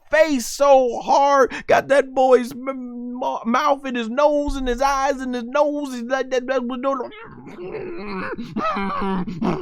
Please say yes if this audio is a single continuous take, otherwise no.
yes